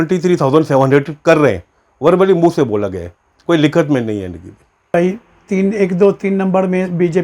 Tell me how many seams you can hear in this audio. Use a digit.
1